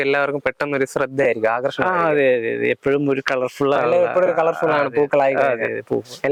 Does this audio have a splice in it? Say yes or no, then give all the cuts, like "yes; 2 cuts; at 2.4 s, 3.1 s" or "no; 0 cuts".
no; 0 cuts